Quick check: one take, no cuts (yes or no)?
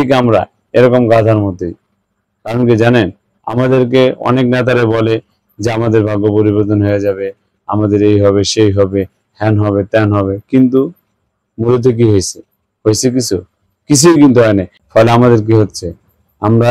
no